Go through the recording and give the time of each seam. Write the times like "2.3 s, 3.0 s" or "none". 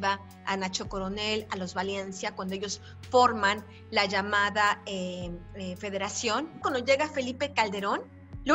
6.6 s